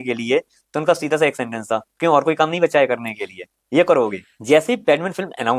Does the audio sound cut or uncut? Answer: cut